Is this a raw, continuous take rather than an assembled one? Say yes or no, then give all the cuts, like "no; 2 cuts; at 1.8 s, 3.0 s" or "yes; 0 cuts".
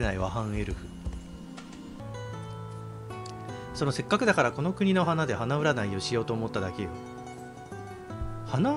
no; 1 cut; at 2.0 s